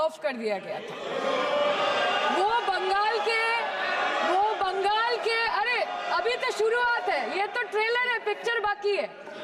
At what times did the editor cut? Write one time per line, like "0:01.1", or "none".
none